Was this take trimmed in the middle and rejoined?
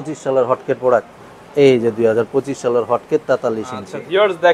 no; 0 cuts

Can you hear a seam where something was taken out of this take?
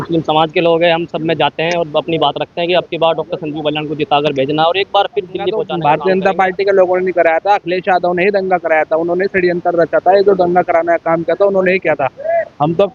yes; 1 cut; at 5.7 s

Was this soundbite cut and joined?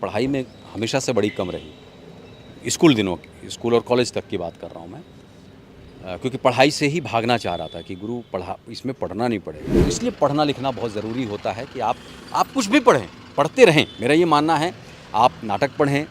yes; 1 cut; at 9.6 s

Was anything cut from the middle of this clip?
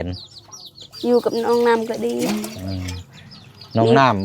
no; 0 cuts

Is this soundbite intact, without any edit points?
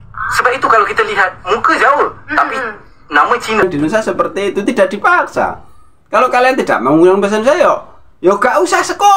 no; 1 cut; at 3.6 s

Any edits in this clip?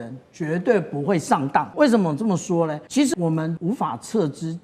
yes; 2 cuts; at 1.7 s, 3.2 s

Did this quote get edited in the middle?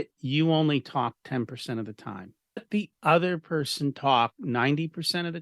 yes; 1 cut; at 2.7 s

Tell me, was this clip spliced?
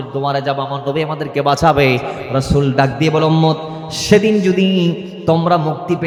no; 0 cuts

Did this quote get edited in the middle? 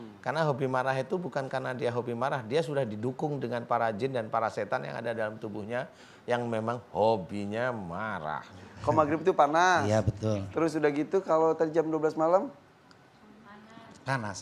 yes; 1 cut; at 8.7 s

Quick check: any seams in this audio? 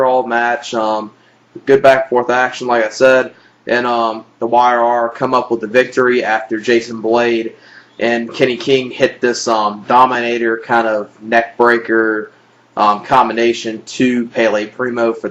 yes; 1 cut; at 7.8 s

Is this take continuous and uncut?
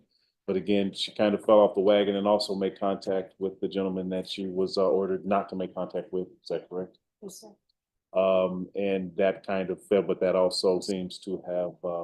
no; 1 cut; at 10.8 s

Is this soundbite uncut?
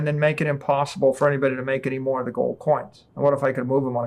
no; 1 cut; at 3.0 s

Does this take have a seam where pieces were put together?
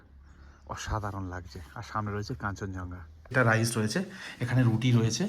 yes; 1 cut; at 3.3 s

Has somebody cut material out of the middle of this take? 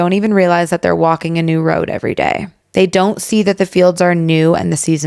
no; 0 cuts

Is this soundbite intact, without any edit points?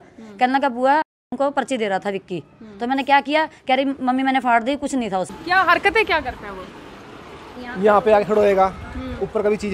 no; 1 cut; at 5.3 s

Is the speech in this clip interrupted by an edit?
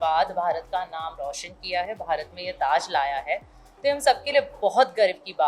no; 0 cuts

